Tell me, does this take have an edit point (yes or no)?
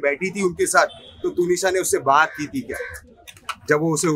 no